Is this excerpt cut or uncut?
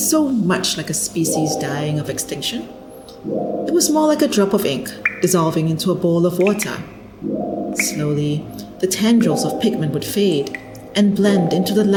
uncut